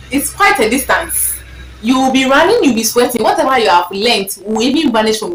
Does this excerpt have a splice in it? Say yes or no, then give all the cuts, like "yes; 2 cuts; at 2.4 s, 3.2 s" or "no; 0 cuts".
no; 0 cuts